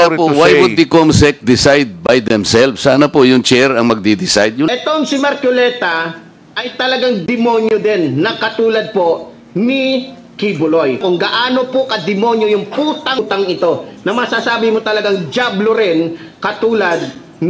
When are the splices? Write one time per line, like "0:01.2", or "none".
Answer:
0:04.7
0:11.0
0:13.2